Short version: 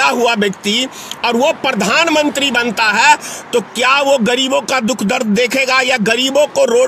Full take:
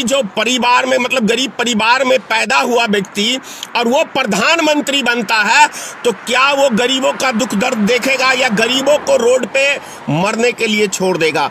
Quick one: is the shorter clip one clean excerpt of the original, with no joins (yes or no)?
yes